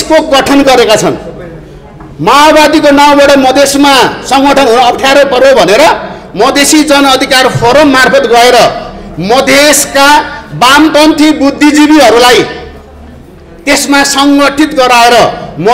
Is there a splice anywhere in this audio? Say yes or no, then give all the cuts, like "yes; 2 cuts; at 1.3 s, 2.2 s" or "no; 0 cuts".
no; 0 cuts